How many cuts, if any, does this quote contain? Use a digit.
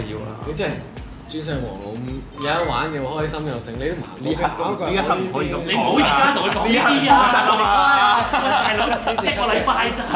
0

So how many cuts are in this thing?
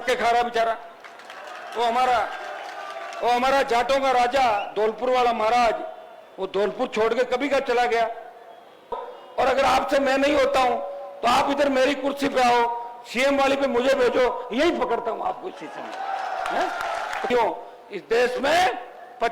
2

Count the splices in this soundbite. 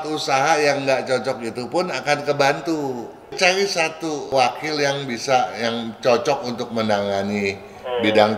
1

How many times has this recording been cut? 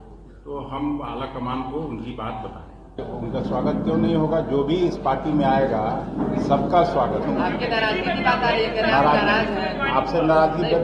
2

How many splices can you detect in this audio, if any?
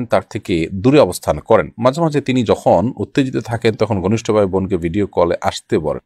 0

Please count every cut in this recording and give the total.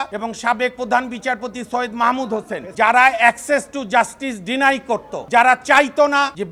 0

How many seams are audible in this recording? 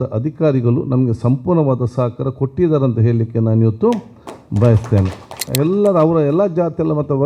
1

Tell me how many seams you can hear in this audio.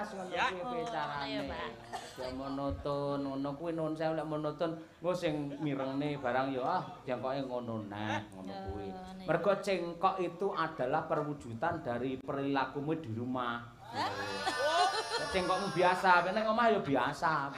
0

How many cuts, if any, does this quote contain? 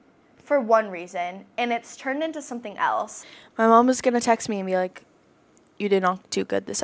1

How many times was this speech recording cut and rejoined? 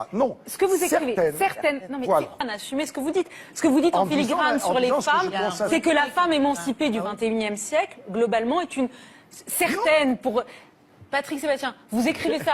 1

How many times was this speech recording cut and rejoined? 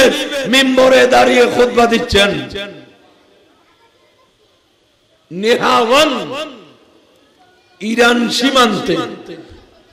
0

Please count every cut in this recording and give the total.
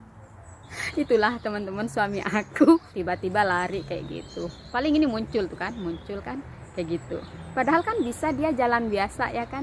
1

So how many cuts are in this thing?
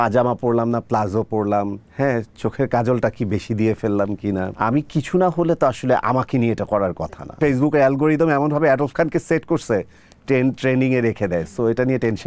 3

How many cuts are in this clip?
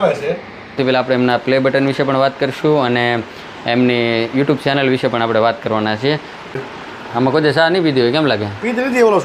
2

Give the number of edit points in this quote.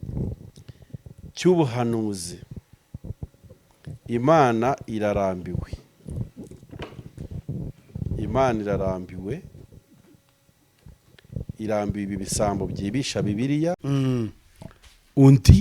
1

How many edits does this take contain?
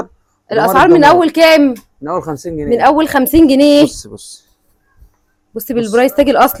0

